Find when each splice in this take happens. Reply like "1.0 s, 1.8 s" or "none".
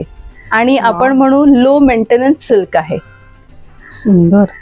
none